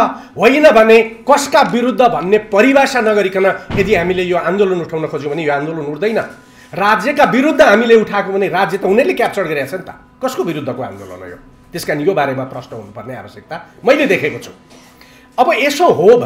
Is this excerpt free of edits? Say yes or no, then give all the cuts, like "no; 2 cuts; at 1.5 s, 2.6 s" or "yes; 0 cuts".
yes; 0 cuts